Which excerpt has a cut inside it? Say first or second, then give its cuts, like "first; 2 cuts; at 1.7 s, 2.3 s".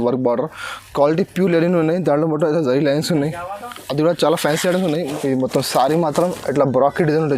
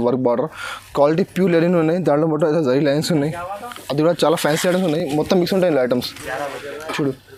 first; 1 cut; at 5.0 s